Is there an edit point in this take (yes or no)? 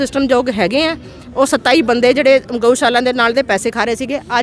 no